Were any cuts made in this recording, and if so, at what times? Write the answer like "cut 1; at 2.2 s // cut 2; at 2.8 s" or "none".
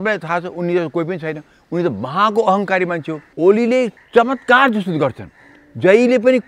cut 1; at 3.2 s // cut 2; at 3.9 s